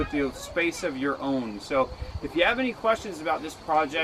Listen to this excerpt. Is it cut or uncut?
uncut